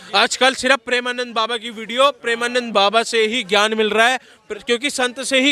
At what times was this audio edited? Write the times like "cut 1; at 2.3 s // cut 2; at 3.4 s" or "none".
none